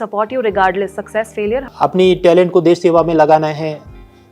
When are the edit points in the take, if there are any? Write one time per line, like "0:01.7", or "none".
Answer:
0:01.7